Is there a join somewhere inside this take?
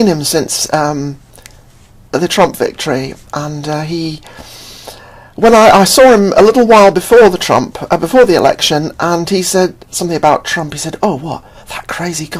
yes; 1 cut; at 11.3 s

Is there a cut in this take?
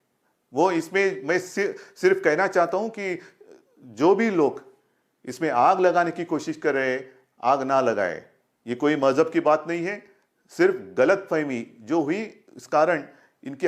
no; 0 cuts

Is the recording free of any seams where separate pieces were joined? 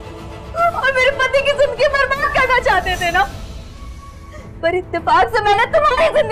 yes; 0 cuts

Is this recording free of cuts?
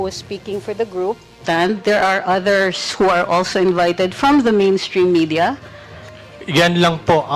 no; 2 cuts; at 1.4 s, 6.0 s

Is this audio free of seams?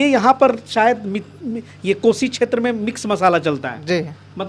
yes; 0 cuts

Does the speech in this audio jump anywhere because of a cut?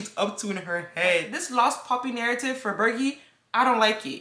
yes; 1 cut; at 1.4 s

